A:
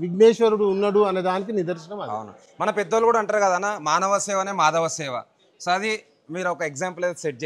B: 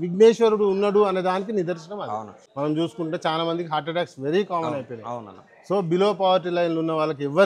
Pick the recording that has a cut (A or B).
B